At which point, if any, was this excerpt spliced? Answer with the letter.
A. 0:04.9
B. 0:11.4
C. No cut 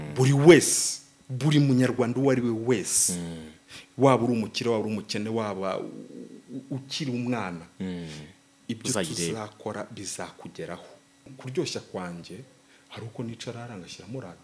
B